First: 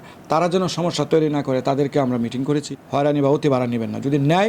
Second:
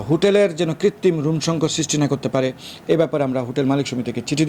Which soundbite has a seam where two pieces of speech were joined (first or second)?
first